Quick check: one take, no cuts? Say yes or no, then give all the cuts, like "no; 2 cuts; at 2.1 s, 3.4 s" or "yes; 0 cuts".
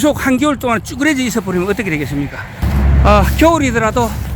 no; 1 cut; at 2.6 s